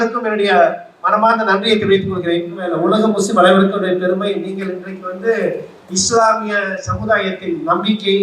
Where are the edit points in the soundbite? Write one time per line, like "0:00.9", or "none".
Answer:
0:02.7